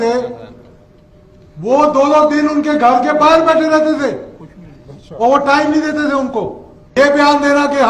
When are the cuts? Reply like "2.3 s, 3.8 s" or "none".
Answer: 7.0 s